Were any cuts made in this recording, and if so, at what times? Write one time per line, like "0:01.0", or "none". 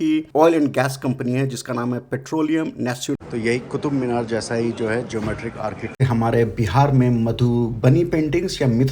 0:03.2
0:05.9